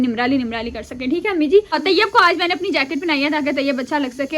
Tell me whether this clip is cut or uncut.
cut